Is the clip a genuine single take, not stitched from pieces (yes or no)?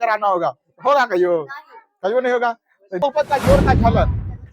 no